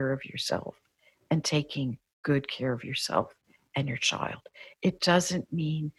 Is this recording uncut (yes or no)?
yes